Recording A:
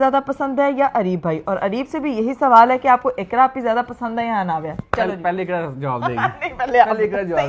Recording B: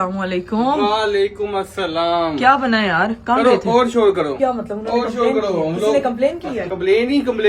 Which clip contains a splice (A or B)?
B